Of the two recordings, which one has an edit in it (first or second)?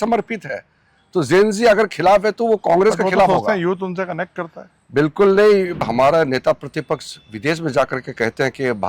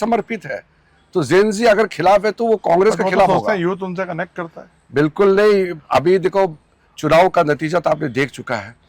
first